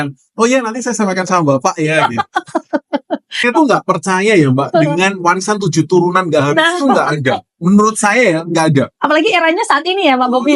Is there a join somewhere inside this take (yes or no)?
yes